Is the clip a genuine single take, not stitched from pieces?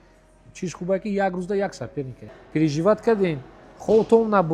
no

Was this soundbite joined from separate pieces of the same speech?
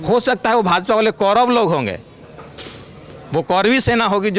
no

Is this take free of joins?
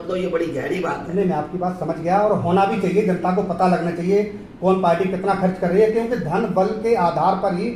yes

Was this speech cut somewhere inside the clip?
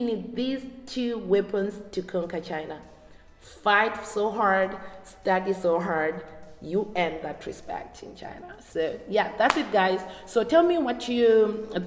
no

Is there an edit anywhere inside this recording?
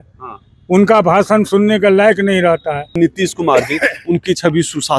yes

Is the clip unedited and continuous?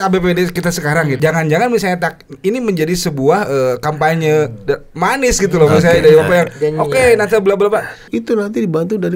no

